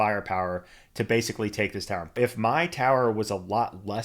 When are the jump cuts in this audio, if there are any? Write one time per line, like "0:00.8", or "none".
0:02.2